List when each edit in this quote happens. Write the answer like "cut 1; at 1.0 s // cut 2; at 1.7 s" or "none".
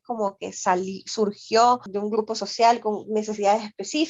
cut 1; at 1.9 s